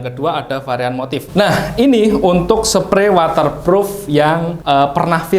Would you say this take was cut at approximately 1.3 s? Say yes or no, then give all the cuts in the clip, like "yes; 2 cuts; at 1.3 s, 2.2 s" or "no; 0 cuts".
yes; 1 cut; at 1.3 s